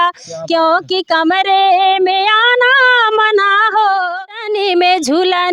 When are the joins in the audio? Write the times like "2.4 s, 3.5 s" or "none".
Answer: 4.2 s